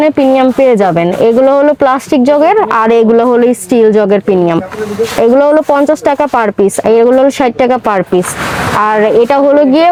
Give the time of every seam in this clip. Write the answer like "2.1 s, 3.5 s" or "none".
none